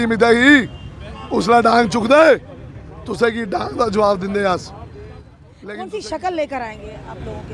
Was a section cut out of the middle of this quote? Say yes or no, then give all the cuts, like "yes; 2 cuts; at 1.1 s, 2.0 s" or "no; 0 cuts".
yes; 1 cut; at 5.5 s